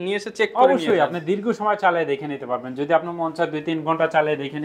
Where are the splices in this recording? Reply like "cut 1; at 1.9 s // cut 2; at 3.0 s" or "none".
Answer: none